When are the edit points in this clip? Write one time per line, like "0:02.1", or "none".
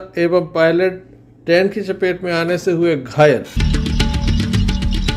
0:03.6